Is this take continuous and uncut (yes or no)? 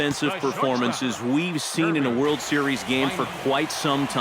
yes